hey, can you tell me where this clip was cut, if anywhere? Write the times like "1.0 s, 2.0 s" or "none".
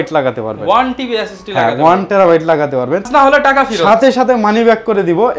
3.1 s